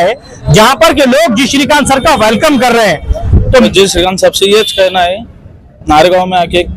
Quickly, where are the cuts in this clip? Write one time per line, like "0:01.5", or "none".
0:03.7